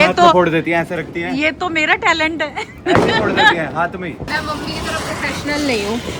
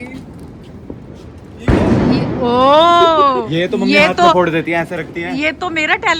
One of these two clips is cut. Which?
first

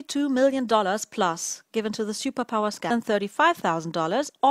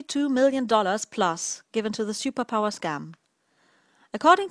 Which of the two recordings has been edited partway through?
second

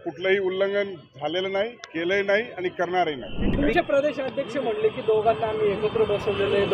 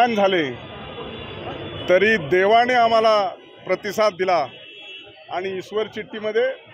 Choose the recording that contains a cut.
first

